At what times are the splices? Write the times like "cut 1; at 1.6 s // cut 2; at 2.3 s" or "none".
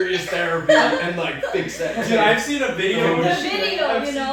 none